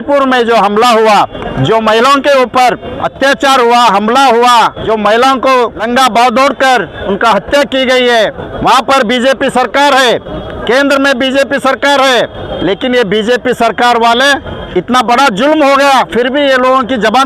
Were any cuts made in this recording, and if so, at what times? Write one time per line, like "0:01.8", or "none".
0:01.4
0:03.0
0:04.8
0:05.8
0:07.0
0:08.5
0:10.5
0:12.5
0:14.6